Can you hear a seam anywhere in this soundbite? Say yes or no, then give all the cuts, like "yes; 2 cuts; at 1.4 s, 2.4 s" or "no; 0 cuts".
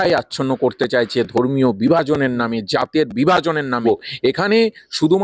yes; 1 cut; at 3.8 s